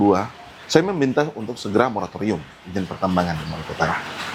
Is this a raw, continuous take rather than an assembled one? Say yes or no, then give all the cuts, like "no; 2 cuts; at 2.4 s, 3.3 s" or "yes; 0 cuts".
yes; 0 cuts